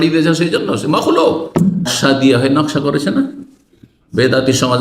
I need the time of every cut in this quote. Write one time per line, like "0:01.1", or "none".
0:01.9